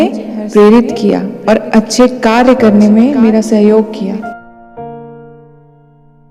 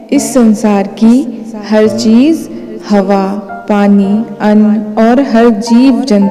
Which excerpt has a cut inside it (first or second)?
first